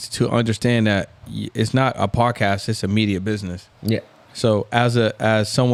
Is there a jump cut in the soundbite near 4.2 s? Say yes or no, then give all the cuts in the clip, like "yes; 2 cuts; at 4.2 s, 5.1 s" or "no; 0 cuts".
no; 0 cuts